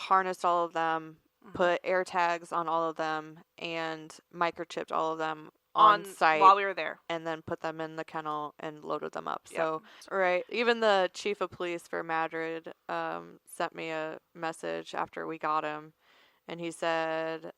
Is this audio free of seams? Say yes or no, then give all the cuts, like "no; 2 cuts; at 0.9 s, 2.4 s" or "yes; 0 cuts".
no; 1 cut; at 10.0 s